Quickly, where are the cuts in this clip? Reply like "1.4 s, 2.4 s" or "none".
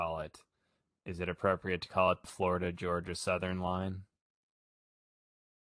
2.3 s